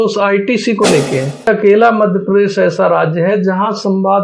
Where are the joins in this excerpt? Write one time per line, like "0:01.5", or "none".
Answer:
0:01.5